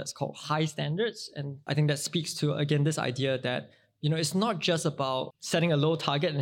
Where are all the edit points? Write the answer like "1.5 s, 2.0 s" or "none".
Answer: 5.4 s